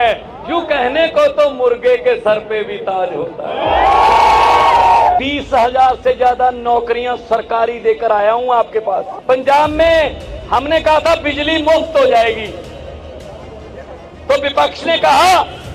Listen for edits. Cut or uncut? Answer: cut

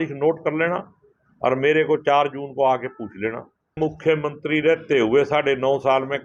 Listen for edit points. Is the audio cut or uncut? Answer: cut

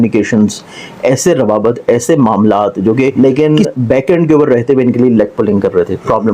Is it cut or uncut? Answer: cut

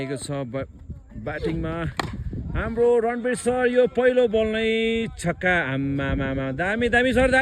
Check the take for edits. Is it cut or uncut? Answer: uncut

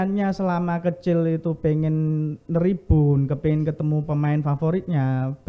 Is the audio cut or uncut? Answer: uncut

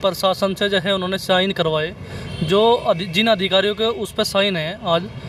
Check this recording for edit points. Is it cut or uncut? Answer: uncut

